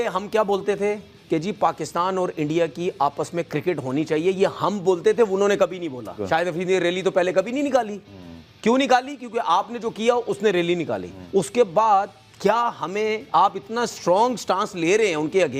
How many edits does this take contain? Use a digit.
2